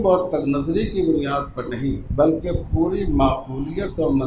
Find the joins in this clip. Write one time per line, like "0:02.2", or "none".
0:02.0